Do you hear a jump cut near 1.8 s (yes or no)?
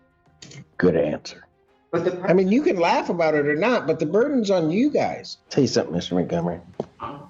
yes